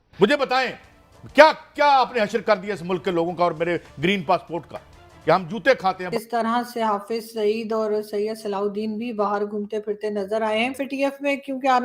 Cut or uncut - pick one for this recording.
cut